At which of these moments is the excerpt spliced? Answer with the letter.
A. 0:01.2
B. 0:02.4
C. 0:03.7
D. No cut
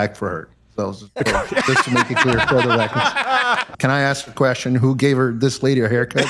C